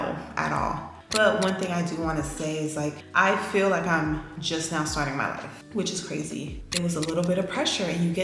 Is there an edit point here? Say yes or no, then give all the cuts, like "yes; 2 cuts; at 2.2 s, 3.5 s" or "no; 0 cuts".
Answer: yes; 2 cuts; at 1.0 s, 6.6 s